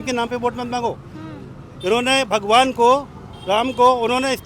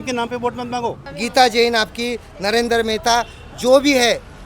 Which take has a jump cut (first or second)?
second